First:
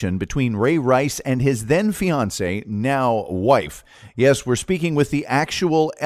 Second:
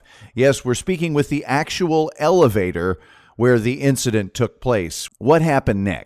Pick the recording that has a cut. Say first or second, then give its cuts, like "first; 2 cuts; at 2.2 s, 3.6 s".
second; 1 cut; at 5.0 s